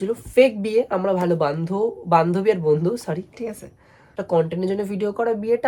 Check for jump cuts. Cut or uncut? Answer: cut